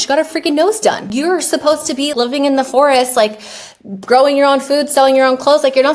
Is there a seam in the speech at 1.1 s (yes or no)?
yes